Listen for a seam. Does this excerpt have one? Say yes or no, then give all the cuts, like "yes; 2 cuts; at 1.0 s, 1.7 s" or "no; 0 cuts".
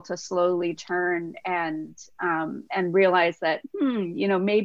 no; 0 cuts